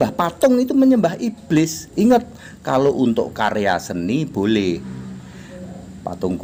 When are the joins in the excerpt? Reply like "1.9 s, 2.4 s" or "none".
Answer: none